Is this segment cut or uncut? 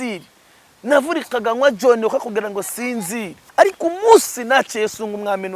cut